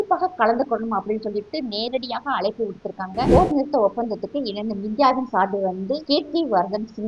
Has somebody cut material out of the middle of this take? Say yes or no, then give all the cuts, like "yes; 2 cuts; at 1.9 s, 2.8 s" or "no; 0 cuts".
yes; 2 cuts; at 3.3 s, 6.0 s